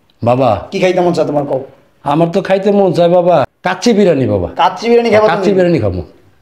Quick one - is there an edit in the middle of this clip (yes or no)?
yes